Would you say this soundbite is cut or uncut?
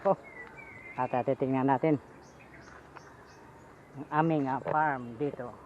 uncut